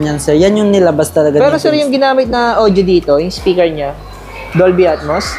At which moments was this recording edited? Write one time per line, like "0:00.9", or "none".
none